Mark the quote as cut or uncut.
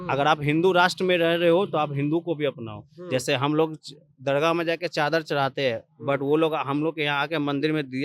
uncut